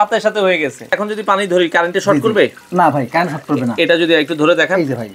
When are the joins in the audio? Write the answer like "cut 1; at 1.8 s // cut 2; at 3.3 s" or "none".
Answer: cut 1; at 1.0 s // cut 2; at 2.6 s